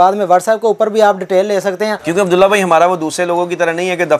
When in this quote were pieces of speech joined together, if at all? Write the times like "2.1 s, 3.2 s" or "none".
2.0 s